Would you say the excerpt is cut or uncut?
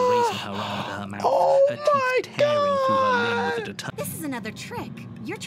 cut